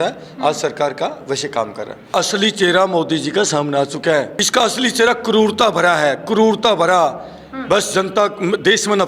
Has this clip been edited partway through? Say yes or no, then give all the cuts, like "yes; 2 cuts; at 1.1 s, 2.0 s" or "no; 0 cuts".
yes; 2 cuts; at 2.1 s, 4.4 s